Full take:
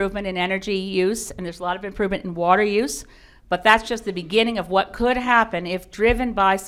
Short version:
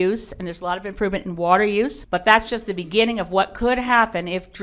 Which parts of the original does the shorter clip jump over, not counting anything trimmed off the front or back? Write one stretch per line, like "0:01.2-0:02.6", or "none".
0:03.0-0:03.4